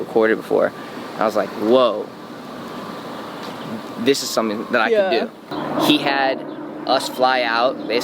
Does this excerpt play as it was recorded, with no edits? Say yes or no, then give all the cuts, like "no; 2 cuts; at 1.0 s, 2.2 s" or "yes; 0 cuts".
no; 1 cut; at 5.4 s